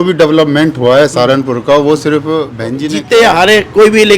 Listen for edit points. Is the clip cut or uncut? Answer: cut